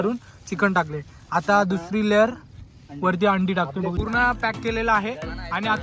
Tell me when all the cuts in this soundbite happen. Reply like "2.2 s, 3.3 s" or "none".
4.0 s

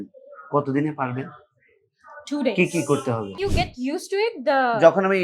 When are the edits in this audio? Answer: 3.4 s

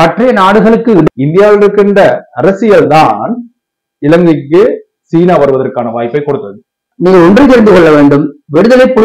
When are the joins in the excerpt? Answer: 1.1 s, 6.9 s

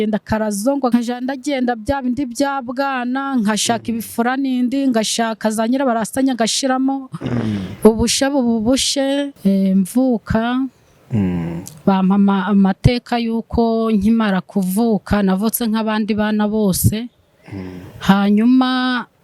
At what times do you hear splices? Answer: 0.9 s, 9.3 s

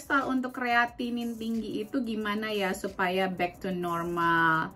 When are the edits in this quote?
none

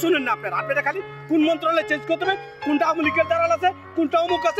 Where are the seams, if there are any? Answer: none

